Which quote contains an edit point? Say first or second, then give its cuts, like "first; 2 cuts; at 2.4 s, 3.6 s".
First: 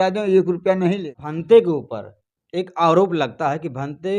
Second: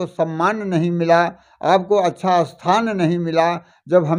first; 1 cut; at 1.1 s